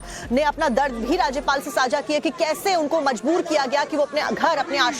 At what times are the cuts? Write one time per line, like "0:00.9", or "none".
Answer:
0:01.8